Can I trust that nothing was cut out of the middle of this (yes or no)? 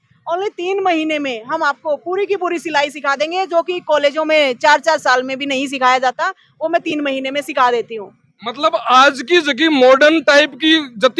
yes